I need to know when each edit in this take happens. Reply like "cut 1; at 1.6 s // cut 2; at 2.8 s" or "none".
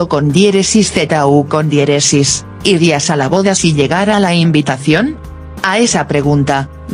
cut 1; at 2.4 s